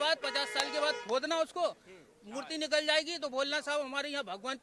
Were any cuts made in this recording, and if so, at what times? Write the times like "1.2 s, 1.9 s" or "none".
none